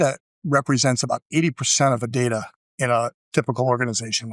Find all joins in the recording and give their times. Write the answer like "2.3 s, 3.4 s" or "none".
2.1 s

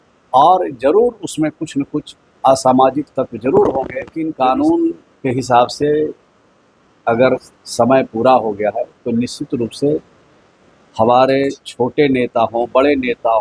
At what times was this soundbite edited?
4.2 s

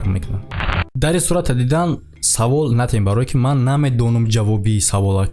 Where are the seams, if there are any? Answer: 1.0 s

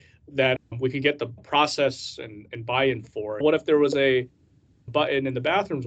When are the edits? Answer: 1.4 s, 3.4 s

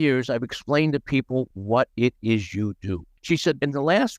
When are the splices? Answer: 1.6 s, 3.1 s

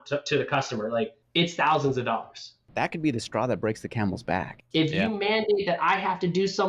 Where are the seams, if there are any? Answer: 1.2 s, 2.6 s, 4.5 s

